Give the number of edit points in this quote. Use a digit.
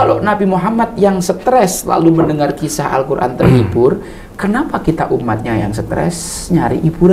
0